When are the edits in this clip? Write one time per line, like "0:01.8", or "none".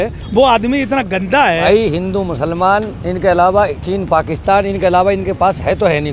0:01.6